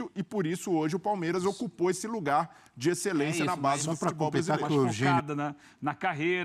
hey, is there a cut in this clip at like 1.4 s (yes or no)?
no